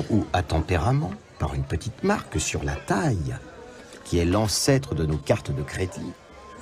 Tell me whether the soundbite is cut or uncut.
uncut